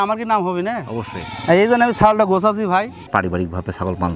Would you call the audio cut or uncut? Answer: cut